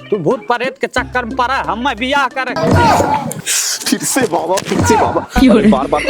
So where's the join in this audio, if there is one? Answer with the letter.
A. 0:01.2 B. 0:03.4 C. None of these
B